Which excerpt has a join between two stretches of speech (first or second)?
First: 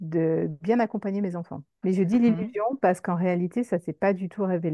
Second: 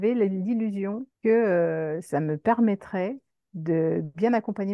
second